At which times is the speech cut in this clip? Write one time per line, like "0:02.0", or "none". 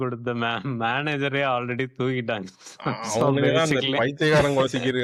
none